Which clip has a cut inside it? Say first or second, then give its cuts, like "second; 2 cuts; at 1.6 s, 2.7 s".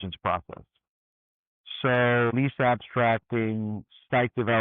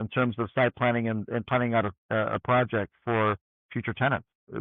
first; 1 cut; at 2.3 s